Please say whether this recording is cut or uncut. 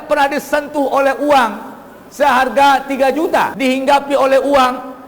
cut